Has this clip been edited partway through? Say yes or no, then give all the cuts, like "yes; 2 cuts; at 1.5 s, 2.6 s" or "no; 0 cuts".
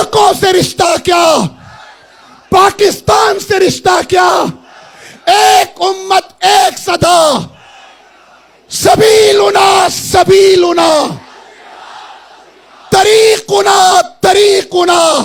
no; 0 cuts